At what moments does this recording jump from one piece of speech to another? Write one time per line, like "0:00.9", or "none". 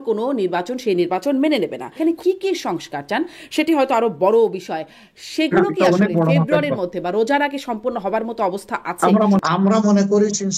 0:01.9
0:09.4